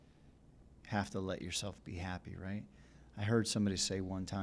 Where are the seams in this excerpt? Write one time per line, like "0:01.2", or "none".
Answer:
none